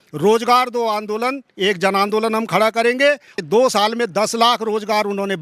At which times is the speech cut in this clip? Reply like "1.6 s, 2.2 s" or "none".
3.4 s